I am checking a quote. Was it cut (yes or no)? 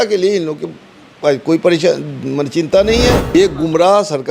yes